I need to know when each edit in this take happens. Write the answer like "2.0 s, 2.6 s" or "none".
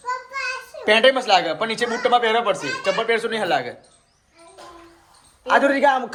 none

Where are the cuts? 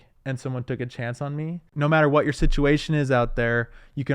1.7 s

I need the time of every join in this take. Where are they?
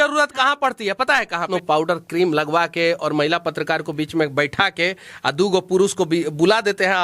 1.4 s

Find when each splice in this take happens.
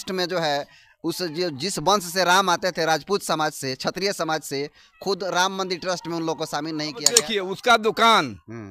7.3 s

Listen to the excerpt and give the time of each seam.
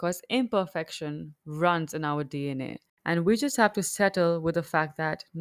2.9 s

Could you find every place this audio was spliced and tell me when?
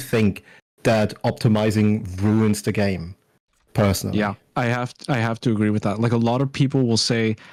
none

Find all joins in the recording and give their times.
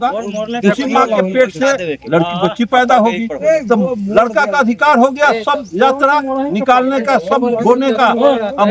none

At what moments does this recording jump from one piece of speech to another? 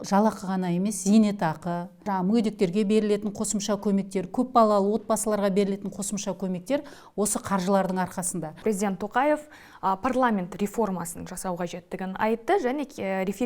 2.0 s, 8.6 s

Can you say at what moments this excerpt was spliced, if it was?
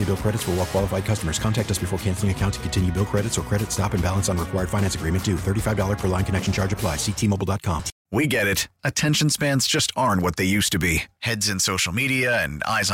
7.9 s

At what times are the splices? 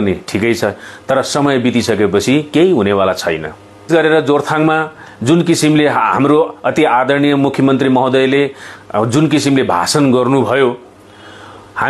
3.9 s

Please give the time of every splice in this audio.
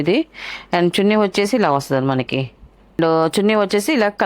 3.0 s

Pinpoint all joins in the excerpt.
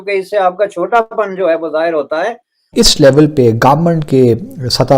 2.8 s

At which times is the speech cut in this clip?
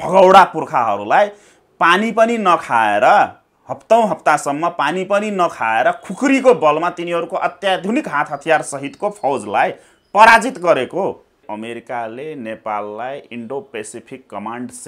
11.5 s

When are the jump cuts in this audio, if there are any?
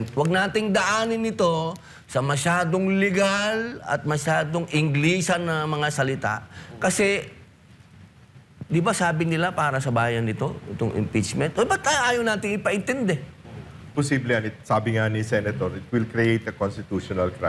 13.9 s

